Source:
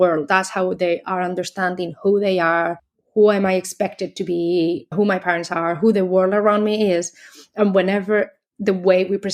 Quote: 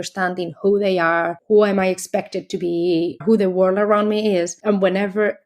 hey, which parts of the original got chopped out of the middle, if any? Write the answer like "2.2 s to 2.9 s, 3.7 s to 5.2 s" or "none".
2.8 s to 3.0 s, 4.9 s to 5.8 s, 7.1 s to 7.5 s

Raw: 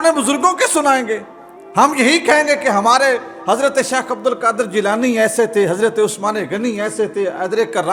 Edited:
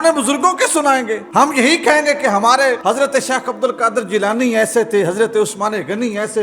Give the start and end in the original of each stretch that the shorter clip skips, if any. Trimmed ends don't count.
1.2 s to 1.6 s, 3.2 s to 3.4 s

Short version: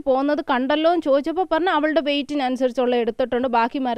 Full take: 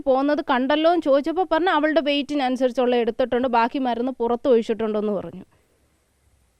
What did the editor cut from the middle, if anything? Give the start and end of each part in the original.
none

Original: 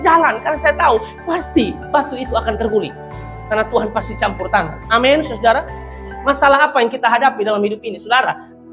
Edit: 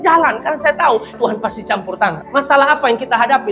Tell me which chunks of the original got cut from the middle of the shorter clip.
1.2 s to 3.7 s, 4.7 s to 6.1 s

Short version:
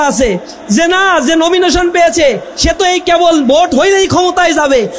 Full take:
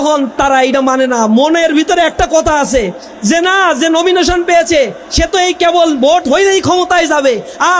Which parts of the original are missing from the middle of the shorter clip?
none

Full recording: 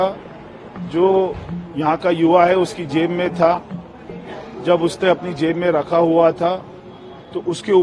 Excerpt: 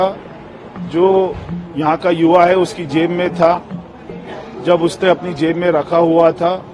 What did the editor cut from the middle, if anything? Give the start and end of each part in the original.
none

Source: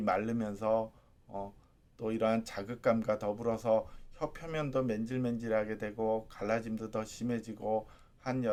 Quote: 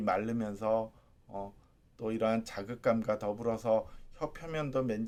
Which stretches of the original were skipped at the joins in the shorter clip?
none

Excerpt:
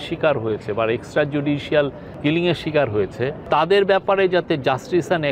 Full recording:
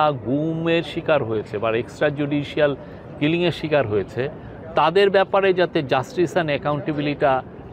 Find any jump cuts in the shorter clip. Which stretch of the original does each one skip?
2.9 s to 3.0 s, 4.4 s to 4.6 s

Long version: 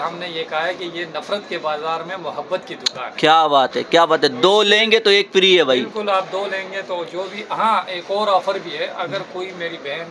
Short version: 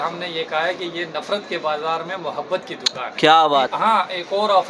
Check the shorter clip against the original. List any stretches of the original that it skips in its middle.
3.7 s to 7.5 s

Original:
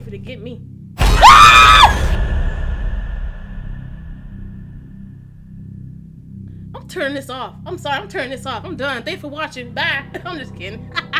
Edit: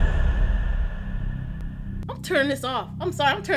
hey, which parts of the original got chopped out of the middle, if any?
4.3 s to 6.5 s

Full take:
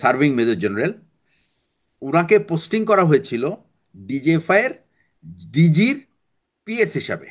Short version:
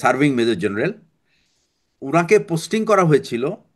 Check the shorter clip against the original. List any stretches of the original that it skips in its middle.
none

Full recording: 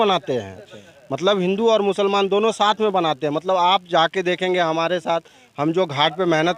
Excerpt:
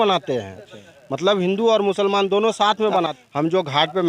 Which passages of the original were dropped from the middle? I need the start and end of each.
3.1 s to 5.3 s

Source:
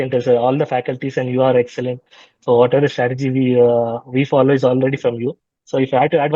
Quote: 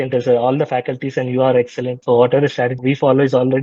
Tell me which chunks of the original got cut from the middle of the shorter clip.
2.0 s to 2.4 s, 3.2 s to 4.1 s

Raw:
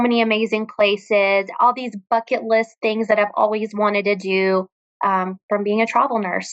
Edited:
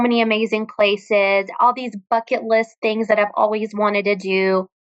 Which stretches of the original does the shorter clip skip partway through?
none

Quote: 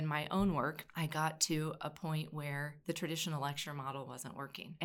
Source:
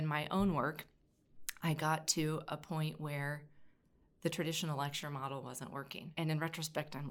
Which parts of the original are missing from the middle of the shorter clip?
0.8 s to 1.5 s, 3.4 s to 4.1 s

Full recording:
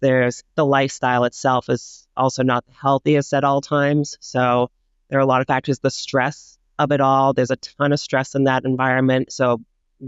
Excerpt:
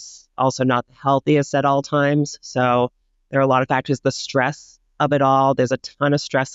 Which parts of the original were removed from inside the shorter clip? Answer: none

